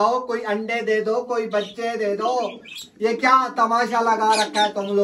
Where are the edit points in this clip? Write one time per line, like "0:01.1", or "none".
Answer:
none